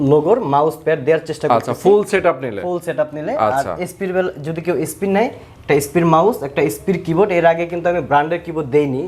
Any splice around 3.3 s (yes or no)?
no